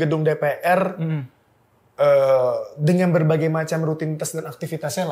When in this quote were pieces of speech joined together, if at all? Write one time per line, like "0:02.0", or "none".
none

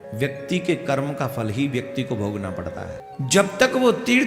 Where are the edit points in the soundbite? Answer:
0:03.0

